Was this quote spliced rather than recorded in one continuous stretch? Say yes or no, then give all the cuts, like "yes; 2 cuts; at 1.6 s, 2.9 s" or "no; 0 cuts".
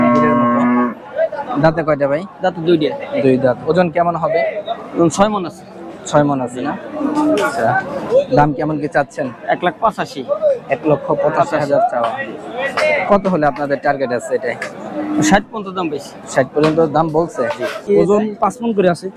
yes; 1 cut; at 17.8 s